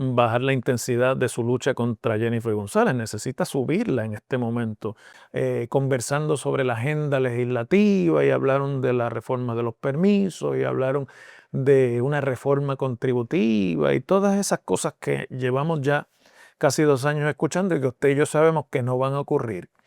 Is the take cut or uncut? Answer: cut